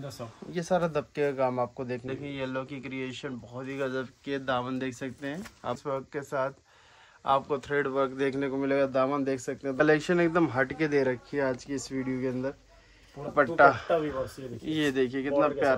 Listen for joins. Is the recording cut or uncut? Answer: cut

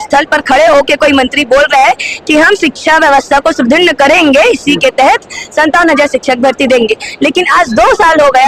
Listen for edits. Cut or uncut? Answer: uncut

